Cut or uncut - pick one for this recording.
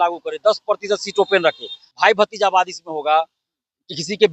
cut